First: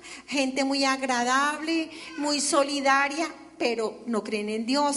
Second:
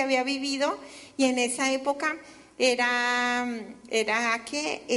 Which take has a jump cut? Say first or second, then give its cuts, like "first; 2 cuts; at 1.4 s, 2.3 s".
second; 1 cut; at 2.9 s